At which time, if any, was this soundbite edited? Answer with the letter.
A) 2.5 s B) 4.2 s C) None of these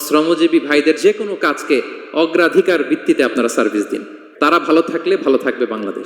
B